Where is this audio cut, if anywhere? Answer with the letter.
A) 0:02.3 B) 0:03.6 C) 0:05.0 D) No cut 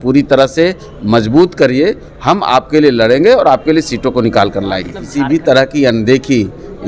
C